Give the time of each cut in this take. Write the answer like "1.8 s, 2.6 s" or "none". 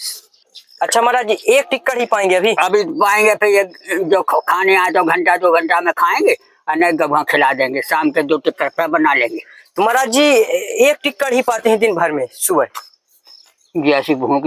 none